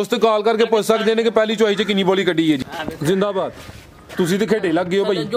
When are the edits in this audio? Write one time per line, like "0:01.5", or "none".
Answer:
0:02.7